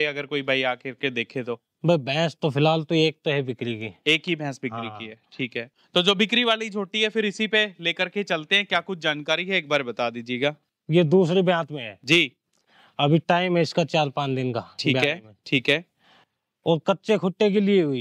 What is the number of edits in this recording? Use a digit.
2